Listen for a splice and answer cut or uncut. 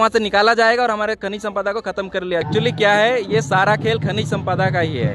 cut